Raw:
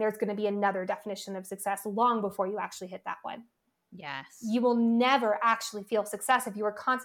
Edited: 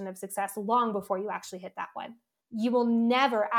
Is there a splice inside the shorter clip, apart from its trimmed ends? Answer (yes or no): yes